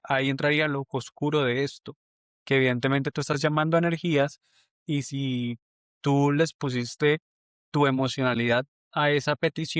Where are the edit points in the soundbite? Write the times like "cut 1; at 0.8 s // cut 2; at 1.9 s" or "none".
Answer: none